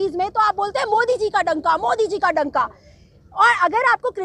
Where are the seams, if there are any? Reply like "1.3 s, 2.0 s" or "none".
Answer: none